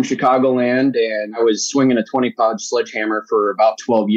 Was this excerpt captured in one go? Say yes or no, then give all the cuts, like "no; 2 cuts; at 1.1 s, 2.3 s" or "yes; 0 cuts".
no; 1 cut; at 1.3 s